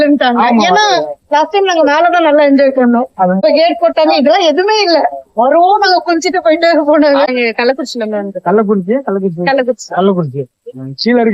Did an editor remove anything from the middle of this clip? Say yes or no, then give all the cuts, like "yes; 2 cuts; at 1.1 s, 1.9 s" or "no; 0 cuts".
yes; 2 cuts; at 3.4 s, 7.3 s